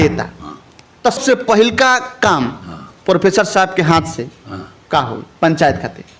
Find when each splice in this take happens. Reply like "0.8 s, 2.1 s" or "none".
1.2 s